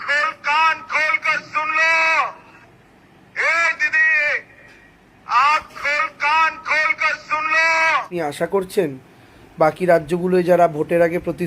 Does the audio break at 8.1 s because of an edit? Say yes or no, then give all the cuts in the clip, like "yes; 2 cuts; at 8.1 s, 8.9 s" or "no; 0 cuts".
yes; 1 cut; at 8.1 s